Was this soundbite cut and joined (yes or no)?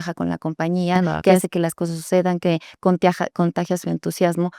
no